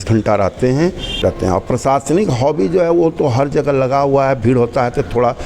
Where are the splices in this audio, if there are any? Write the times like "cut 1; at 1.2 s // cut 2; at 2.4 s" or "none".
cut 1; at 1.2 s